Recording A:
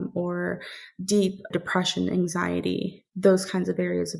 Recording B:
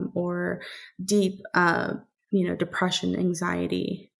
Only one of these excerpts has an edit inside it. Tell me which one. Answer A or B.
A